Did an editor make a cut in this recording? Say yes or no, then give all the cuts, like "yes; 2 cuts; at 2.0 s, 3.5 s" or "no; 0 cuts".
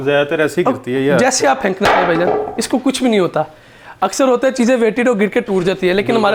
no; 0 cuts